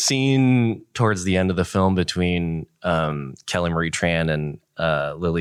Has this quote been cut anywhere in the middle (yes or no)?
no